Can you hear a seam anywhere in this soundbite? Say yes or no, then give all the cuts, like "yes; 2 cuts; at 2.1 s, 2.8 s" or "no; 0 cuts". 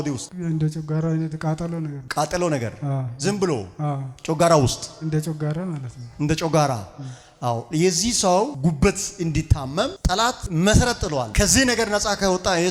no; 0 cuts